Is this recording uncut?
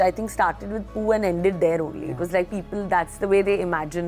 yes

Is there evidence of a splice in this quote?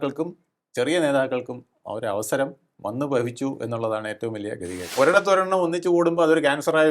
yes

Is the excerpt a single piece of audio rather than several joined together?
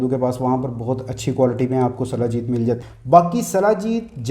no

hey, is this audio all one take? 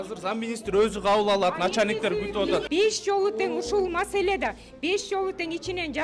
no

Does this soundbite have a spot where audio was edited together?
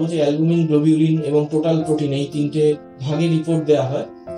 yes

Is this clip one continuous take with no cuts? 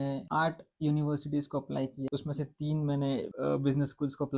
yes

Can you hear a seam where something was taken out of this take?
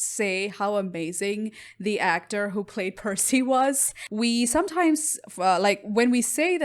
yes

